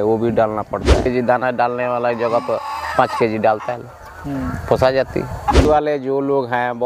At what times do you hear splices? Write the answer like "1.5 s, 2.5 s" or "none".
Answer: 1.1 s, 5.6 s